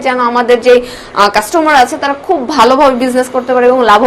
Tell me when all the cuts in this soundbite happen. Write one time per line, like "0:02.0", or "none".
none